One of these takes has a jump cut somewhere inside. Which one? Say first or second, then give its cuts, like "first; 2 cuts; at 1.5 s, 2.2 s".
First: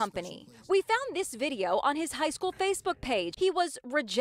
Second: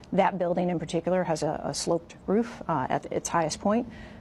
first; 1 cut; at 3.3 s